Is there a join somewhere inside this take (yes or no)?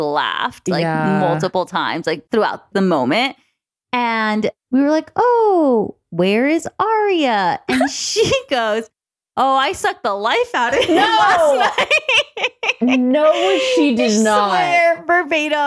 yes